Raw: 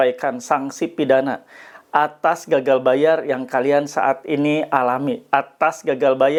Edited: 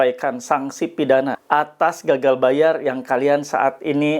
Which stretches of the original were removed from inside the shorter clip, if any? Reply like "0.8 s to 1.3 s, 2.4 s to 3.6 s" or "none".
1.4 s to 1.8 s